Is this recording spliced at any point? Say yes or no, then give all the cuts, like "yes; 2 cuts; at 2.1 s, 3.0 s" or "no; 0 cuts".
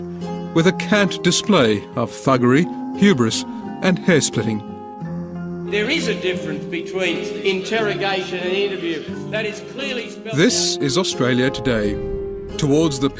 yes; 1 cut; at 3.8 s